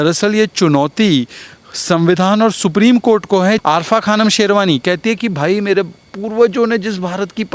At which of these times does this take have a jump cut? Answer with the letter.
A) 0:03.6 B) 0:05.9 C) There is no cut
A